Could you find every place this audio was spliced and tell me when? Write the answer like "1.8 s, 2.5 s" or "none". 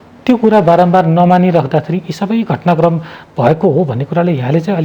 none